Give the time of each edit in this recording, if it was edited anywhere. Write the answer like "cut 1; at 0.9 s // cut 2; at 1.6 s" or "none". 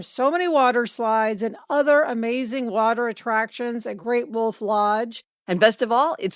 cut 1; at 5.2 s